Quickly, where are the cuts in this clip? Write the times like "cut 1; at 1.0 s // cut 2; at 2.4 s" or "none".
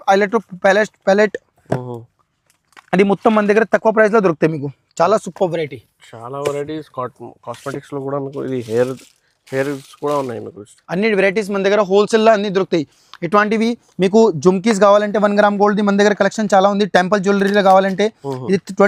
none